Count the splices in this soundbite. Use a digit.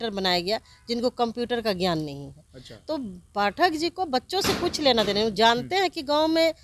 0